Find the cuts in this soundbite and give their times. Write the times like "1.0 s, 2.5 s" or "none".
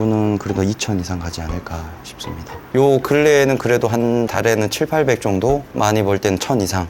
2.7 s